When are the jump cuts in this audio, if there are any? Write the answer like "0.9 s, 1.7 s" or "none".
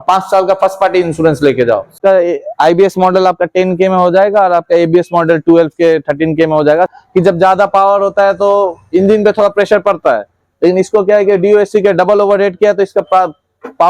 2.0 s, 6.9 s